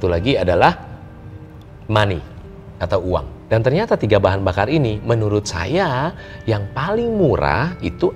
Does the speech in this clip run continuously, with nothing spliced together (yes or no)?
no